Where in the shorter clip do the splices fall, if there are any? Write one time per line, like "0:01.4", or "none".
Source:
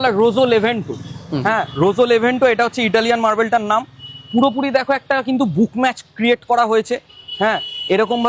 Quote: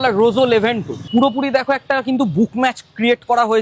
0:00.9